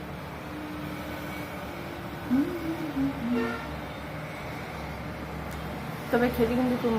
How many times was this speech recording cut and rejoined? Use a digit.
0